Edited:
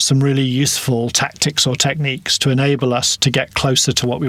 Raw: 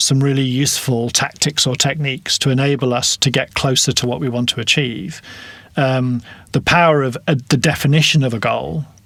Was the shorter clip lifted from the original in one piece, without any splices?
yes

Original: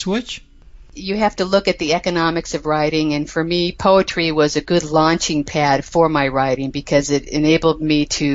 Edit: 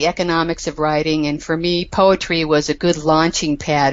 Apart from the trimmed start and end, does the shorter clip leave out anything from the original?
no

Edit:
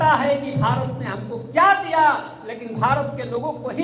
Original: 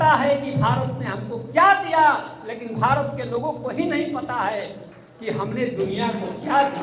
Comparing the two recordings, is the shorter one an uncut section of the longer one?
yes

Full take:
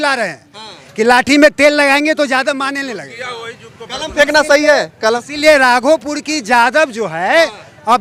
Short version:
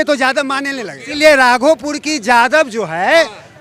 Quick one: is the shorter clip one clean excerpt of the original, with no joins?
no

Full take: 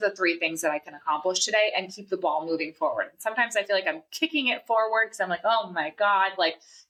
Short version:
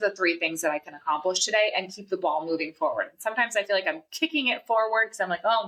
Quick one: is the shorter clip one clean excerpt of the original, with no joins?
yes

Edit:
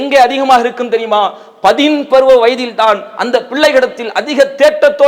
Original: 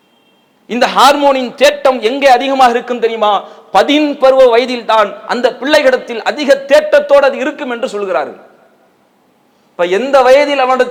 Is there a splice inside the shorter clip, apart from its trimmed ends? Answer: no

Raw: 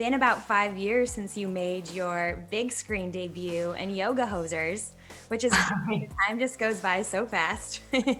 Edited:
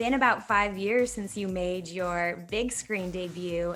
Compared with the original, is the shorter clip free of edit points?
yes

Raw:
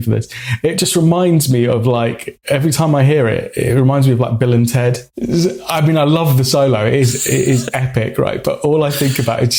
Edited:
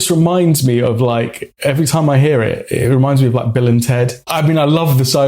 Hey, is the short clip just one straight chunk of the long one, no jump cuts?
no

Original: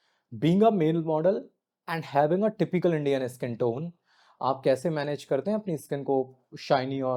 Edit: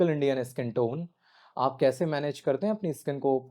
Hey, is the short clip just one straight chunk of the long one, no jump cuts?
yes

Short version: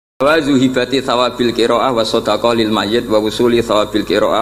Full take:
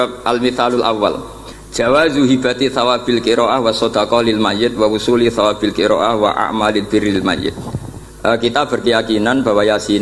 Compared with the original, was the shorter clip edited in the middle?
no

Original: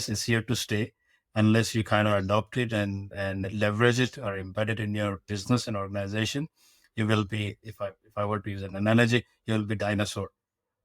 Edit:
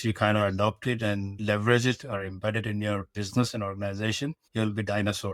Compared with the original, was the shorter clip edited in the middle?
yes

